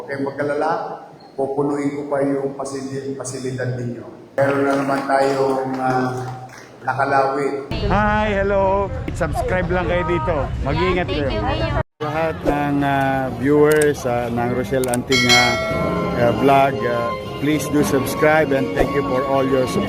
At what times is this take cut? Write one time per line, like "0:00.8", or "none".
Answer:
0:04.2
0:07.7